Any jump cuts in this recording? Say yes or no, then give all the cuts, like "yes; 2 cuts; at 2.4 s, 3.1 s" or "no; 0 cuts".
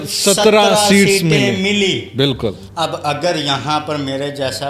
yes; 1 cut; at 2.6 s